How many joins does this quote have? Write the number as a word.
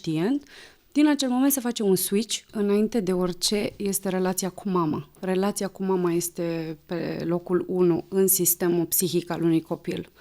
one